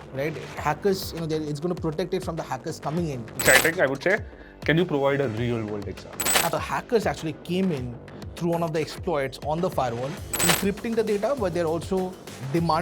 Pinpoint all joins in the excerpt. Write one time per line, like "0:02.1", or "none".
0:03.4
0:06.5
0:10.4